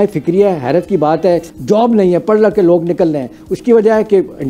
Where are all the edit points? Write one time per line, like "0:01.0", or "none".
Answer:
0:01.5